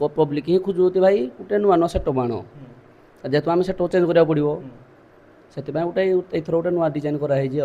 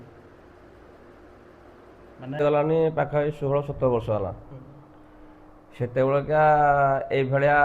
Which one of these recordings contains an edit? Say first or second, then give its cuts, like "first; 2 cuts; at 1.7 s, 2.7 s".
second; 1 cut; at 2.4 s